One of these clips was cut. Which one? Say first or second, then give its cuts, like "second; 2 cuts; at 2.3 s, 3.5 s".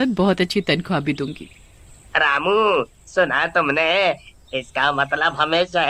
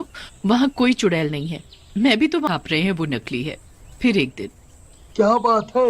second; 1 cut; at 2.5 s